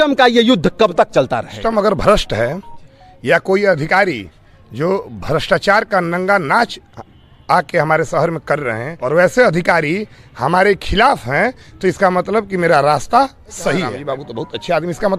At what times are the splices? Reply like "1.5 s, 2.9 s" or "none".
1.6 s, 8.9 s, 13.9 s